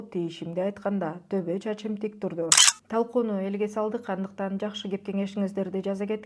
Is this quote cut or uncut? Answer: cut